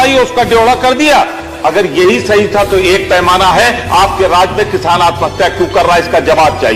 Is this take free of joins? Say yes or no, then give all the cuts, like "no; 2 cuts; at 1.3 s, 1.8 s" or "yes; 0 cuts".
yes; 0 cuts